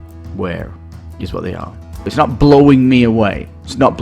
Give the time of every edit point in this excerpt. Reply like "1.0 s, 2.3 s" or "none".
2.1 s